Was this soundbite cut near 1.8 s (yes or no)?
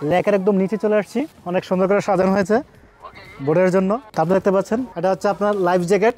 no